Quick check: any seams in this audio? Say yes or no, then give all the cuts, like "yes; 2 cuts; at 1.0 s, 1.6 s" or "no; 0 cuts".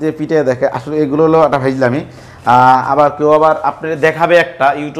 no; 0 cuts